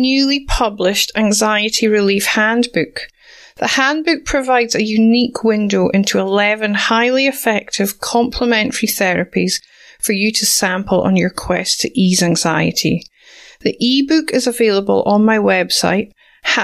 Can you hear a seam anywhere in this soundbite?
no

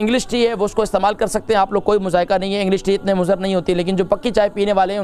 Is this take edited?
no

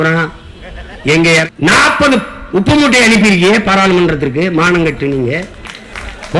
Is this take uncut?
no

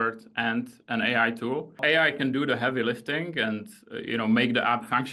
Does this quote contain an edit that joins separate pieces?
yes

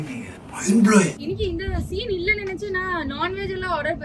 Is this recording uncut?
no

